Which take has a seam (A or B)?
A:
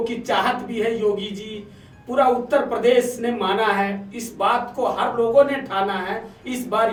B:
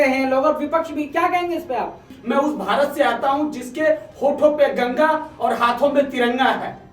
B